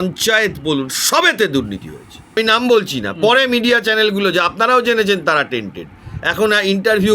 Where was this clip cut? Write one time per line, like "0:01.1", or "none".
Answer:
0:02.4